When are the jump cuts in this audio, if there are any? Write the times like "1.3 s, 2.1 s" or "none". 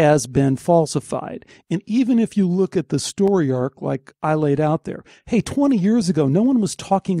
none